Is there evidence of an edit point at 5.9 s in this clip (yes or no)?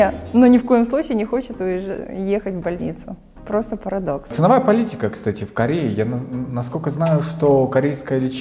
no